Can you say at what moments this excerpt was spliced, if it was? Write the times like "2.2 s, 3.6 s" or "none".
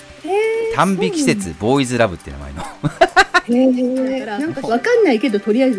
4.3 s